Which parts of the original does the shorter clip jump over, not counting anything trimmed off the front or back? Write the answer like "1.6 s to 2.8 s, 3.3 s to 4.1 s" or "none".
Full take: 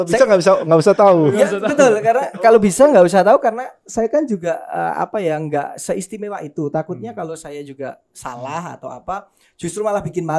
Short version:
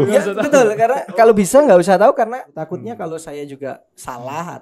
3.9 s to 6.8 s